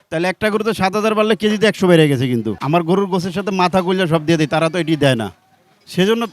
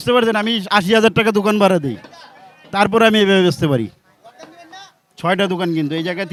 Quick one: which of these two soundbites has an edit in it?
first; 1 cut; at 2.6 s

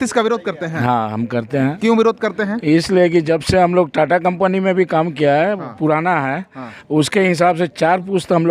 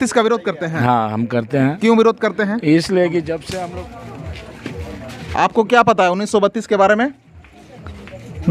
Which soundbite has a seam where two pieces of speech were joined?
second; 1 cut; at 3.5 s

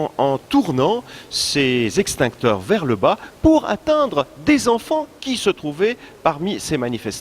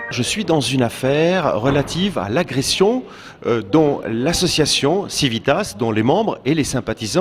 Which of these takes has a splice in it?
first; 1 cut; at 5.7 s

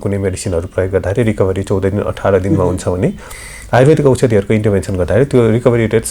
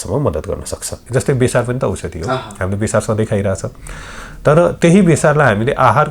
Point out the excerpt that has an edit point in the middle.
second; 1 cut; at 0.9 s

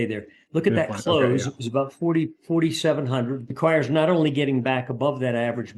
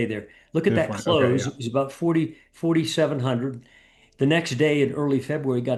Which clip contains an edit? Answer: first; 2 cuts; at 2.4 s, 3.5 s

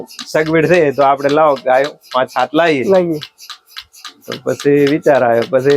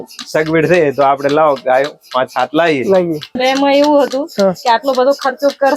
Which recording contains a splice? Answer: second; 1 cut; at 3.4 s

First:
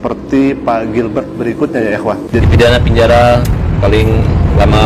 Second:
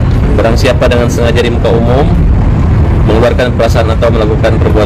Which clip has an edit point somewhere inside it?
first; 1 cut; at 2.4 s

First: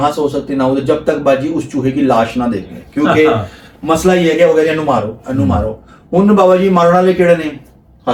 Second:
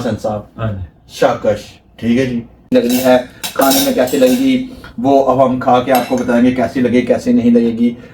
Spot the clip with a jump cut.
second; 1 cut; at 2.7 s

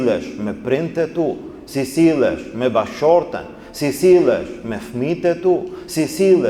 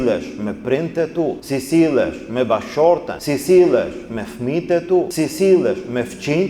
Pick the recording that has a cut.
second; 3 cuts; at 1.4 s, 3.2 s, 5.1 s

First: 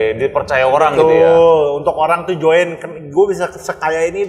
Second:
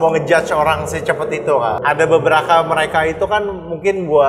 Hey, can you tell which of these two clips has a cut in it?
second; 1 cut; at 1.8 s

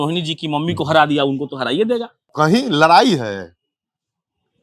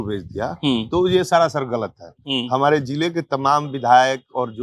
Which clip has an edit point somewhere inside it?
first; 1 cut; at 2.2 s

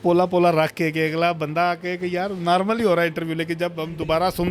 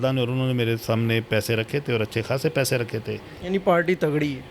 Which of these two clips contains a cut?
second; 1 cut; at 3.3 s

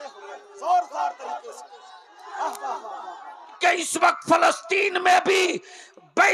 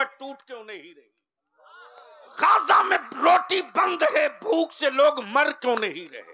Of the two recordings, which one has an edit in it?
first; 1 cut; at 3.5 s

